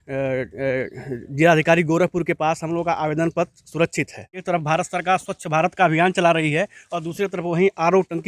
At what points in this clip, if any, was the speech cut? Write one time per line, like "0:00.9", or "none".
0:04.4